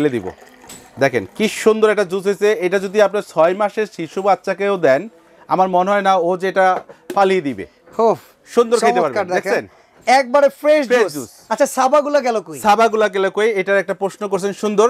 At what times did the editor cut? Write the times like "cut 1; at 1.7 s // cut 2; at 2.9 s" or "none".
none